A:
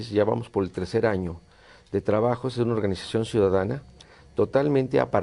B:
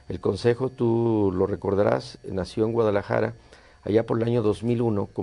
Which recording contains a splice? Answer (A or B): A